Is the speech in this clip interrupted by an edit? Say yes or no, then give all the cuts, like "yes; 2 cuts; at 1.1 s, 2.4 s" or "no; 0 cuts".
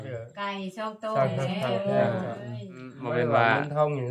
yes; 1 cut; at 3.0 s